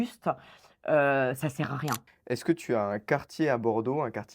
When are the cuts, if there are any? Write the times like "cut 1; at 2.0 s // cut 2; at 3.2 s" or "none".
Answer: cut 1; at 2.0 s